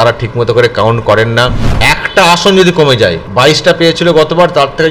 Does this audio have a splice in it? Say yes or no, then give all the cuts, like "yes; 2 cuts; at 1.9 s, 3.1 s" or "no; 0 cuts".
yes; 2 cuts; at 1.7 s, 3.2 s